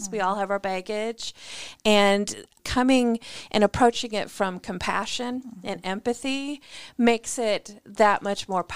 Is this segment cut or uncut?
cut